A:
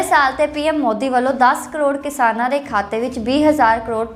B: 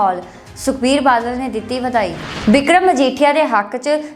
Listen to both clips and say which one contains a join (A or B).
B